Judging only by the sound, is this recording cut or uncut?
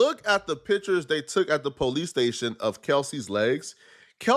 uncut